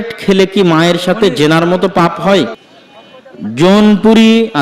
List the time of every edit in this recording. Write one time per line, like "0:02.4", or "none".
0:02.6